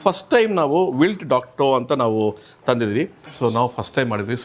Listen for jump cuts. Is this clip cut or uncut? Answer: cut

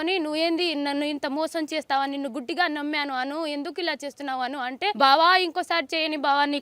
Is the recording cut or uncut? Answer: cut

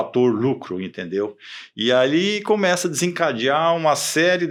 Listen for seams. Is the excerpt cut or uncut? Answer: uncut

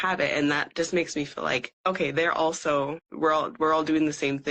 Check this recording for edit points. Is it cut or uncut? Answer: cut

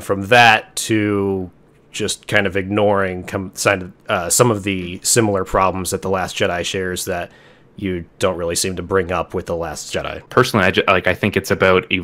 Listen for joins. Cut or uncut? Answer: cut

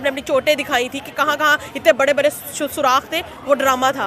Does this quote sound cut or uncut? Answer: uncut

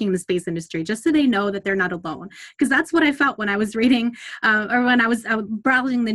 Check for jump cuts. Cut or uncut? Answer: uncut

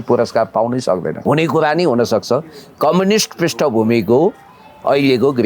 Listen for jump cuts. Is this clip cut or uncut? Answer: cut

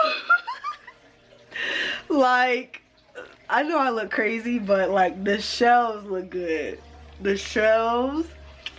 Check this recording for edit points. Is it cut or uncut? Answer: uncut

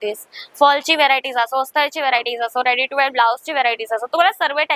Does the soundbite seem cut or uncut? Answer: uncut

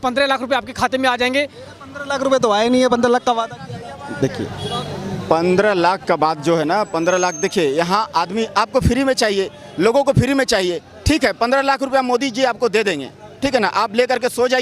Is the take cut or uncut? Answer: uncut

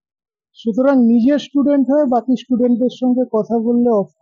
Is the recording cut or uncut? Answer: uncut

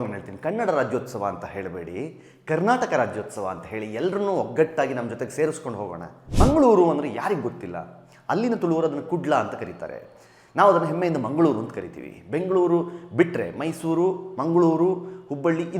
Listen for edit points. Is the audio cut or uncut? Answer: cut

